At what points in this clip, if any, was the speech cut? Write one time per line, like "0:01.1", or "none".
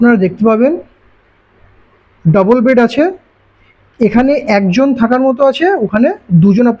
none